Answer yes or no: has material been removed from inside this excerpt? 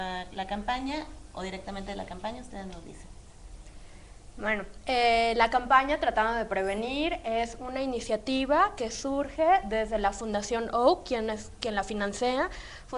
yes